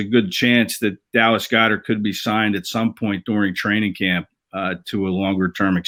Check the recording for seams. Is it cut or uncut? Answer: uncut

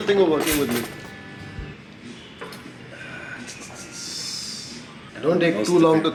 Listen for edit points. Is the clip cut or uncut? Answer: uncut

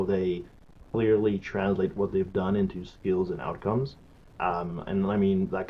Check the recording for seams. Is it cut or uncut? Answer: uncut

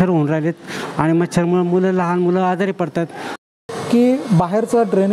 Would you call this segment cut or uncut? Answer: uncut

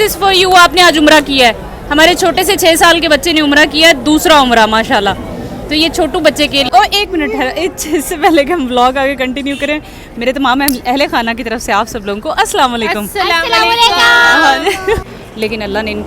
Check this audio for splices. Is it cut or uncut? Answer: cut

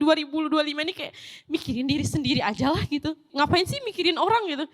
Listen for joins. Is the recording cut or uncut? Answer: uncut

